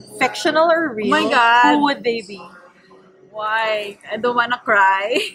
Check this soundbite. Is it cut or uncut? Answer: uncut